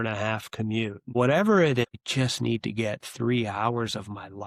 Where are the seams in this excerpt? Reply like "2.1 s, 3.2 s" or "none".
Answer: 1.1 s, 2.0 s